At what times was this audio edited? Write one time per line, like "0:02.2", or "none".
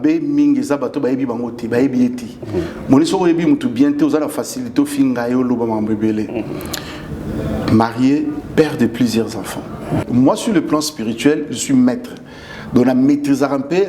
0:10.0